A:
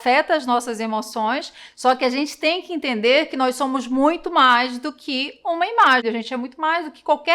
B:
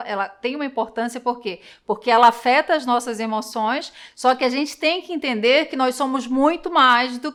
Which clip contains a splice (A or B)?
A